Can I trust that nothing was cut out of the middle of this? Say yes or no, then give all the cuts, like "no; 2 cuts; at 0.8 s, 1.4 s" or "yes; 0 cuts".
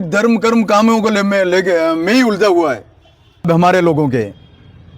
no; 1 cut; at 3.5 s